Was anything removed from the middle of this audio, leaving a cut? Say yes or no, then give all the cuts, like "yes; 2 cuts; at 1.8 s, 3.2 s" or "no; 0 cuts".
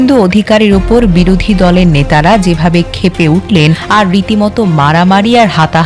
yes; 1 cut; at 3.8 s